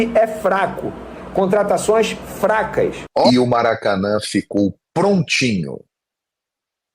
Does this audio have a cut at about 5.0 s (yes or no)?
no